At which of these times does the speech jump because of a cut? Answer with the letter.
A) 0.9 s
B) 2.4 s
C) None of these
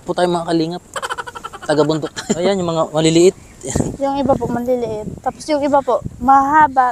B